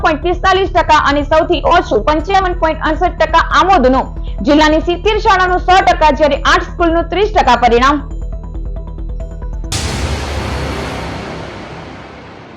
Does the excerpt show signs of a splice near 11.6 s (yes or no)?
no